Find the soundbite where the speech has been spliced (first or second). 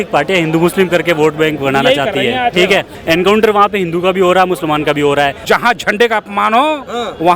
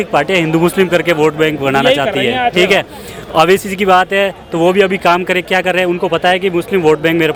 first